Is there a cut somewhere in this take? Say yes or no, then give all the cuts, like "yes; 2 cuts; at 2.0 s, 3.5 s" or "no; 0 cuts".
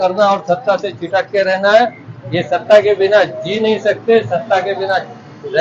no; 0 cuts